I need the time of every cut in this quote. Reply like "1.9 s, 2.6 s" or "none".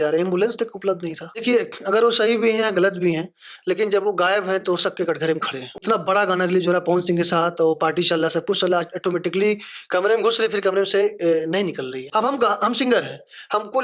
1.3 s, 5.8 s, 12.1 s